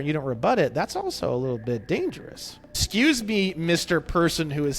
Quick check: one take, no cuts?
no; 1 cut; at 2.8 s

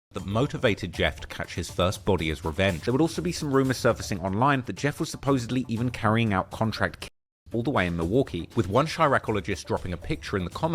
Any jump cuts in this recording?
yes; 1 cut; at 2.8 s

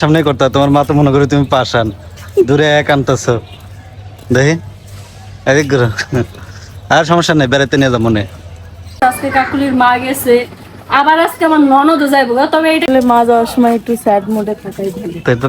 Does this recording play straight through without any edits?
no; 2 cuts; at 9.0 s, 12.8 s

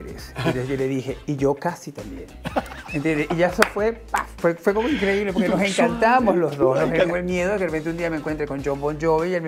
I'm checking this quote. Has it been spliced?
yes; 1 cut; at 7.1 s

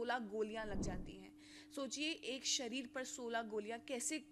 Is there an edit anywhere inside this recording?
no; 0 cuts

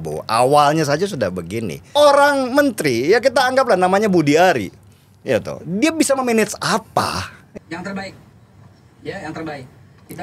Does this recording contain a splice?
yes; 2 cuts; at 1.9 s, 7.4 s

